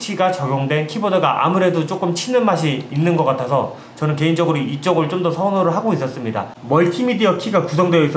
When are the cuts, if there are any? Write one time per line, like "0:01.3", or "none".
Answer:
0:06.5